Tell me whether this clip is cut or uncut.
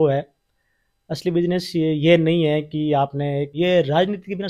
cut